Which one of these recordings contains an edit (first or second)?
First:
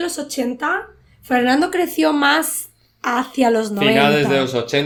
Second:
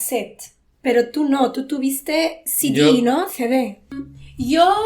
second